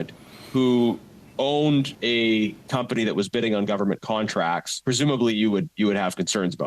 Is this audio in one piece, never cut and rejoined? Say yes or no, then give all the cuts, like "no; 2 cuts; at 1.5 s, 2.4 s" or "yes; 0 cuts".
no; 2 cuts; at 1.9 s, 4.7 s